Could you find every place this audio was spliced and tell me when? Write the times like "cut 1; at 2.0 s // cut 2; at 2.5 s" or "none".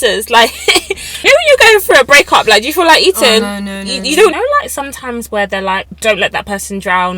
cut 1; at 1.2 s // cut 2; at 4.3 s // cut 3; at 5.9 s